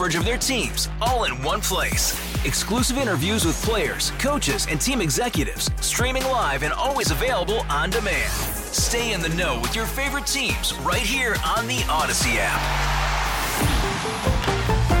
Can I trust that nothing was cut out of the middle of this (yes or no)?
yes